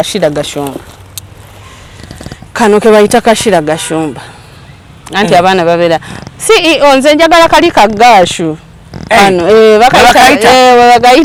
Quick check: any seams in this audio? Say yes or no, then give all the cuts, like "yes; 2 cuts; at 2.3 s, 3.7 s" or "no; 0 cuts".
no; 0 cuts